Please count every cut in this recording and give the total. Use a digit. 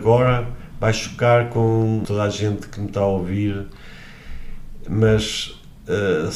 1